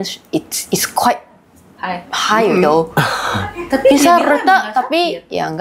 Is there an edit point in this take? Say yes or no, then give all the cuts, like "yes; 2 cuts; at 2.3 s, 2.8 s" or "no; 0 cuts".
no; 0 cuts